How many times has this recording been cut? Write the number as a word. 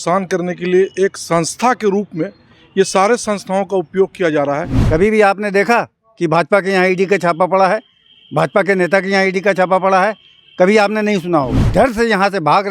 two